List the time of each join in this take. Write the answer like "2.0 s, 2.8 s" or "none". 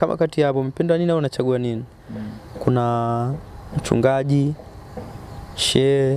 none